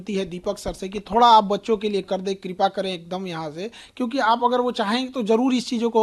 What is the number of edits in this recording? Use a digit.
0